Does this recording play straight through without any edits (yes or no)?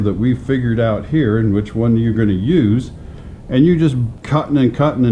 no